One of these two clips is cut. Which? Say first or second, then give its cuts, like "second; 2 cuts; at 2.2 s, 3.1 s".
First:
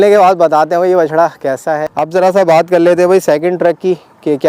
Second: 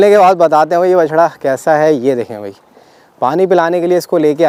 first; 1 cut; at 1.7 s